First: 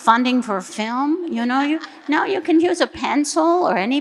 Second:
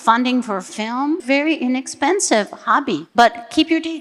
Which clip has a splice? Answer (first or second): second